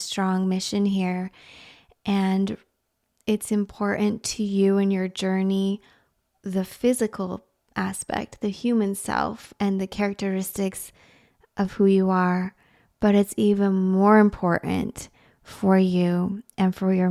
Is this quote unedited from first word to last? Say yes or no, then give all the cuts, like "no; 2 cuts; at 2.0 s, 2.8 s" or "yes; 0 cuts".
yes; 0 cuts